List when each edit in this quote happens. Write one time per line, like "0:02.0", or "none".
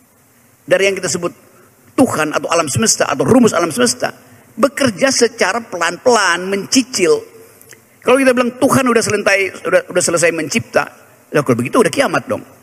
none